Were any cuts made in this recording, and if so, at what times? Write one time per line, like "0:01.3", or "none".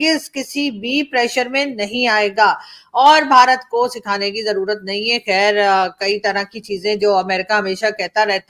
none